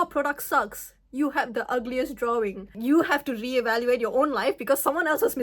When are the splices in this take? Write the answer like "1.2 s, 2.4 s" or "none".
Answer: 2.8 s

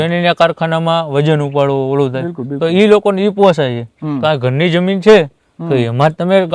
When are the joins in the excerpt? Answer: none

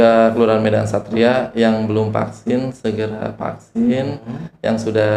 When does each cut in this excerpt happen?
none

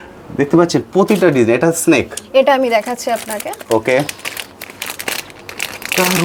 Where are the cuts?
none

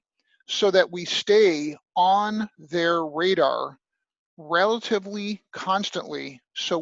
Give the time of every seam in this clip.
none

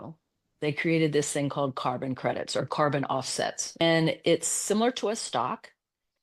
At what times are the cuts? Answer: 3.8 s

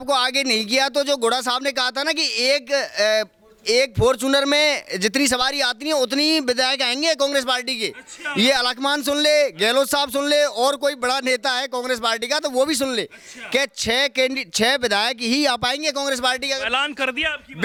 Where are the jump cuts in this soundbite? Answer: none

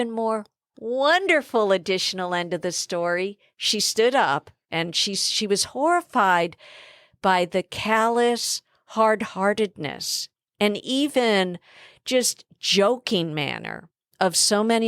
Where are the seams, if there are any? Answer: 4.6 s

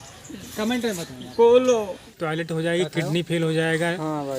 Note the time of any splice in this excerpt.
2.1 s

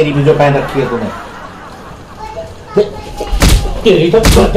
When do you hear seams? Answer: none

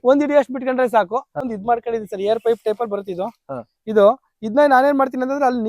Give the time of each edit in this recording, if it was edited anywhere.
1.5 s

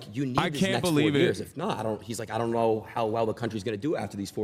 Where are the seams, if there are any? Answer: none

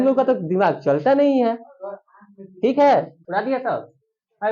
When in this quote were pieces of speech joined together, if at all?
3.2 s

